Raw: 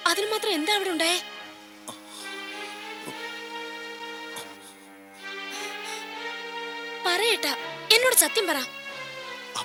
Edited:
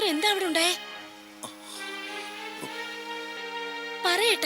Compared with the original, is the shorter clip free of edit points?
no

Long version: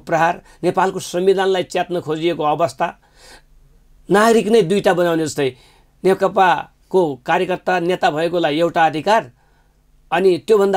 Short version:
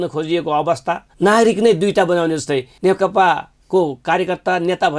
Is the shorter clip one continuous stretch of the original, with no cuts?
no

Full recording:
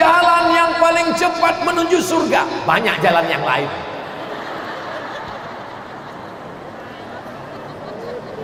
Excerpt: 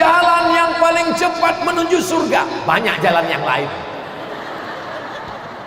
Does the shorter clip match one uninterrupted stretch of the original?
yes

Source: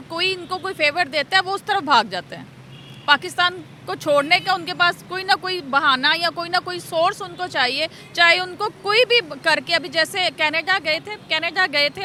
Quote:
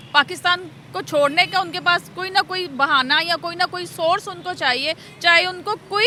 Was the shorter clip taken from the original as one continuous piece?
yes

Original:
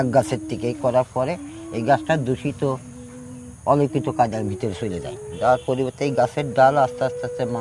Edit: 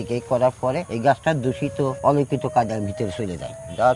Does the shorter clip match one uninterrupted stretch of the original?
no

